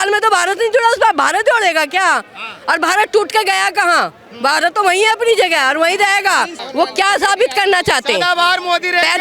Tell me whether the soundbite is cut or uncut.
cut